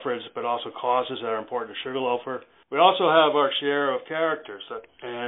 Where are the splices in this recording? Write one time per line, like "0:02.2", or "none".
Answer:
0:02.5